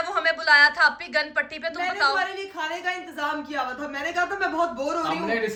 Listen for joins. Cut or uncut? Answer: uncut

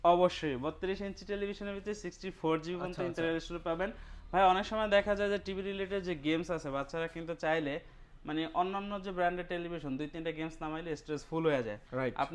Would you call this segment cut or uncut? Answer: uncut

